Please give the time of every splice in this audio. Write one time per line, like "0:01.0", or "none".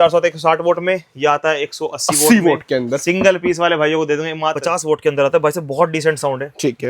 0:04.6